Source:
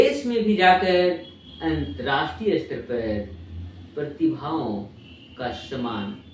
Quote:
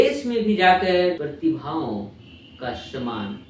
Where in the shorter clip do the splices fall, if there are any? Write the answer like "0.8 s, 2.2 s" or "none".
1.4 s